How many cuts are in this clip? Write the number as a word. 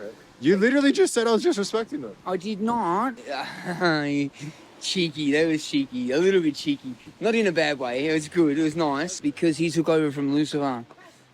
two